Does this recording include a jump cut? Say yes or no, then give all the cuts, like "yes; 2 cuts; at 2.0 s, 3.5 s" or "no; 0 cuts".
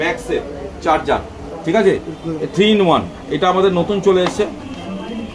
no; 0 cuts